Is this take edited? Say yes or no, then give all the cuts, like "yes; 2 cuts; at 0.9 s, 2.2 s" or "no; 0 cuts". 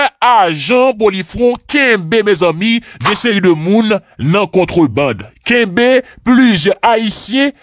no; 0 cuts